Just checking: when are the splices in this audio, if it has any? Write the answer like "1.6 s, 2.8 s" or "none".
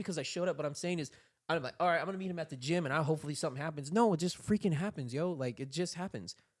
none